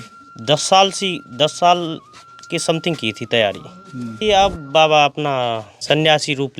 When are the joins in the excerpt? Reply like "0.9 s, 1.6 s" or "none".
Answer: 4.2 s, 5.7 s